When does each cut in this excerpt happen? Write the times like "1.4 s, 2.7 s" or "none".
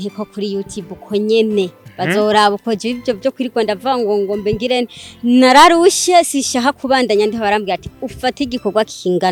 none